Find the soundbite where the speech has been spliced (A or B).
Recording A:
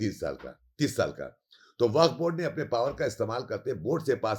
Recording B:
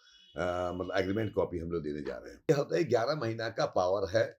B